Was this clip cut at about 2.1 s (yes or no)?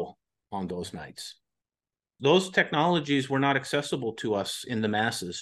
yes